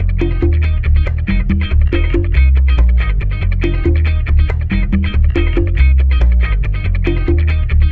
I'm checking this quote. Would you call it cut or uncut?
uncut